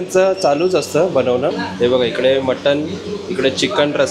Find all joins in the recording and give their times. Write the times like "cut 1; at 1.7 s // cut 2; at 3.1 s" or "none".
cut 1; at 1.6 s